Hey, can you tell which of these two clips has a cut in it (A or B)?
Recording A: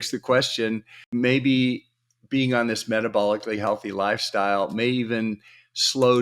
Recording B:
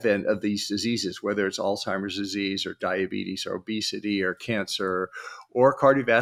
A